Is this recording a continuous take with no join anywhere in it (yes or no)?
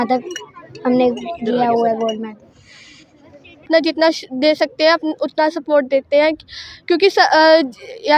no